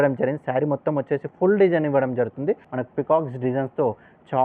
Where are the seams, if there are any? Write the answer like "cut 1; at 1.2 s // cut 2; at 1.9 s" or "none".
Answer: cut 1; at 2.7 s